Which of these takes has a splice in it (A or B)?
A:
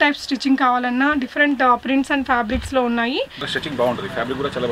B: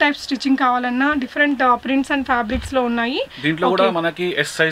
A